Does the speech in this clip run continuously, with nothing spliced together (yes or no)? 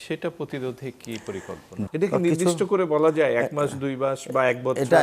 no